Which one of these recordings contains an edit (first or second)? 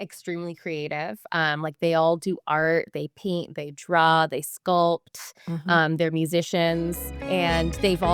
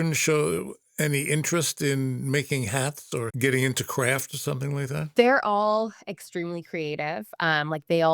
second